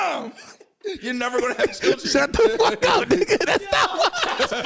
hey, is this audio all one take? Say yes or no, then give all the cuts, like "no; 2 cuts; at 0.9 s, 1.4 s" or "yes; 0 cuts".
yes; 0 cuts